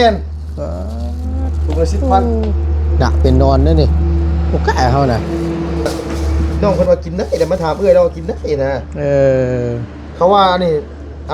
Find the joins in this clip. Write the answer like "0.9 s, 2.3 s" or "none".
6.5 s